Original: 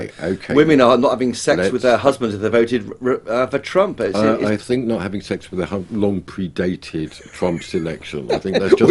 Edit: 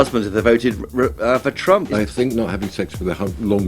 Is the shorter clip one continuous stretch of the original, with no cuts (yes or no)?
no